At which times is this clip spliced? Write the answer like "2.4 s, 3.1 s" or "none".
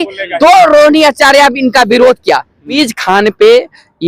2.7 s